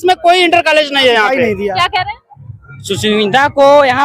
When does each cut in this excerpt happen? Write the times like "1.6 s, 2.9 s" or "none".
1.4 s

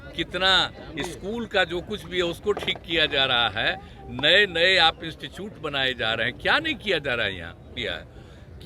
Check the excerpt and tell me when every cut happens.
7.8 s

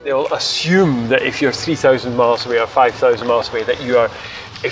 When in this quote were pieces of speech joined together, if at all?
none

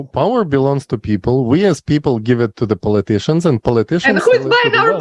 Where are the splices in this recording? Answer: none

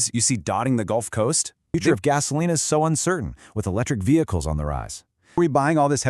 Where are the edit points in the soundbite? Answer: 1.7 s, 5.4 s

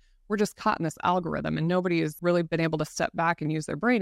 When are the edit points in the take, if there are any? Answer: 2.3 s

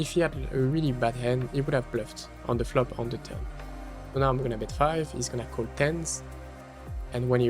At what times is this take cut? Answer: 1.5 s

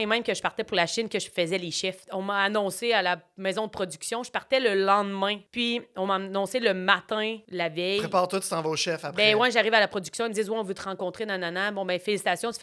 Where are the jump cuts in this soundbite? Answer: 2.0 s, 5.4 s, 7.4 s

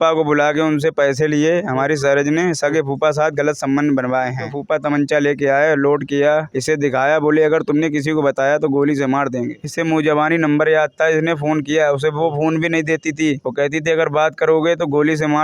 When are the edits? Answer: 4.5 s, 9.6 s

